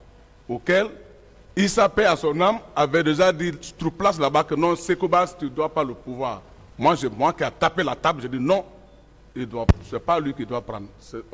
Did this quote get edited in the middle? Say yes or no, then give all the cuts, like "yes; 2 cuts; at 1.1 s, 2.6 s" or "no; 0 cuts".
no; 0 cuts